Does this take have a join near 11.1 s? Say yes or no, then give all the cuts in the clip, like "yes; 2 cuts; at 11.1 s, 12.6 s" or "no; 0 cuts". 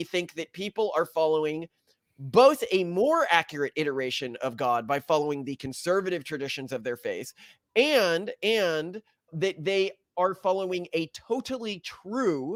no; 0 cuts